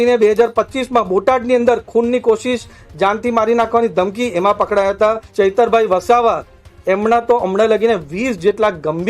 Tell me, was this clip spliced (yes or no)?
yes